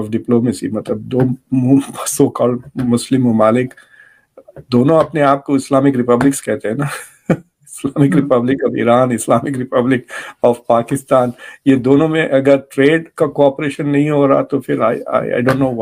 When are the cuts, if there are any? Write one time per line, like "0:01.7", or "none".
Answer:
none